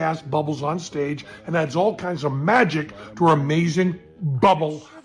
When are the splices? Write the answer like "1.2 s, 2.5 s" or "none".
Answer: none